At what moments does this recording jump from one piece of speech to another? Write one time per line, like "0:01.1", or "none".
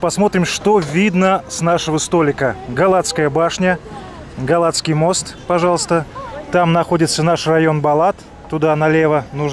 none

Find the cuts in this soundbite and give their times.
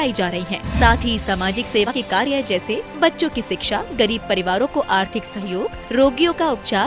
0:01.9

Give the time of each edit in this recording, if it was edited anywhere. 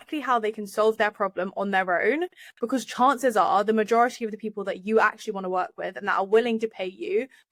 none

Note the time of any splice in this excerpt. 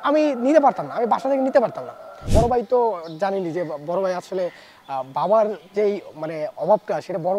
0:02.2

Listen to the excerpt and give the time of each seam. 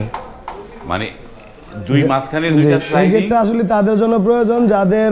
none

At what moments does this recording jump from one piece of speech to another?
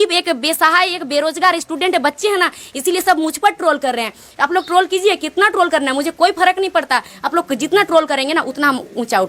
none

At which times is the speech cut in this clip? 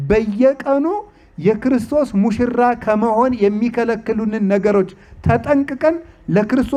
none

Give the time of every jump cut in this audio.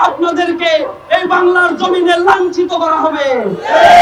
none

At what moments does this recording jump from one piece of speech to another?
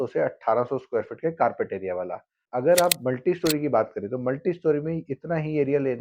0:02.4

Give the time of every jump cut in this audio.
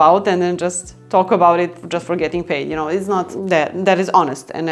0:01.8
0:03.3

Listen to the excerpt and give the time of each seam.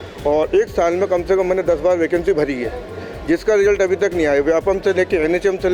none

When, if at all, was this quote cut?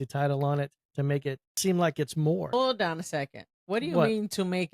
0:01.5
0:02.5

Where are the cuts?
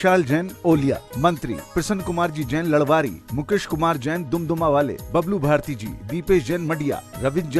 none

